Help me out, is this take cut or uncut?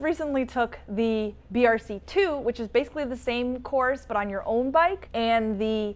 cut